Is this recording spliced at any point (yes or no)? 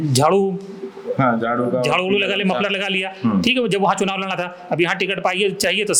no